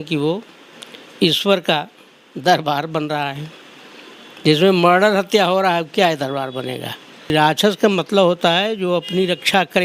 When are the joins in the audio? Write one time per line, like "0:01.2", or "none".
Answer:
0:07.3

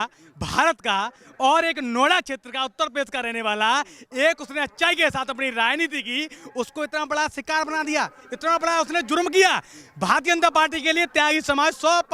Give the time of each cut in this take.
none

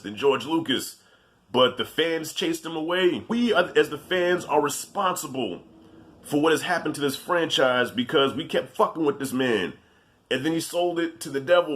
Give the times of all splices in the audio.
0:03.3

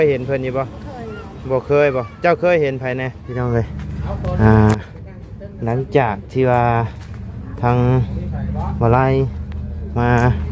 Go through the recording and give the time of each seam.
0:03.2

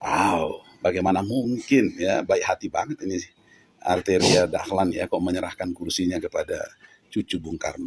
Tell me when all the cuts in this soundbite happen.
none

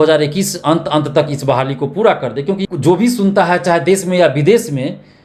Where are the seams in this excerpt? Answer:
0:02.6

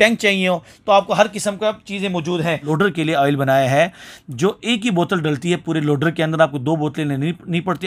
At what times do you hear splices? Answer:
0:02.7

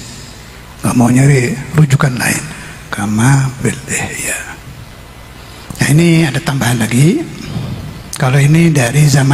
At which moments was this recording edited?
0:05.4

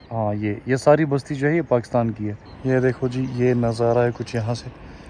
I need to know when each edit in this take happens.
0:02.6

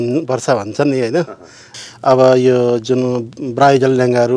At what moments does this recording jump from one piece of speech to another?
0:01.7

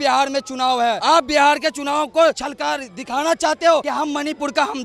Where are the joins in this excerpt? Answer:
0:01.0
0:02.5
0:03.9

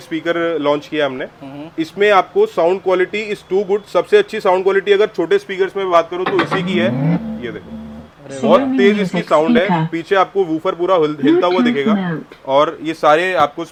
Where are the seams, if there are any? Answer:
none

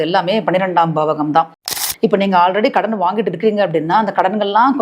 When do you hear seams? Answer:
0:01.7

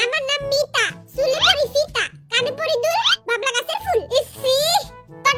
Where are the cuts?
none

